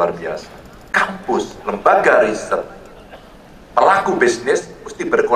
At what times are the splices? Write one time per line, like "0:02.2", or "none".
0:00.9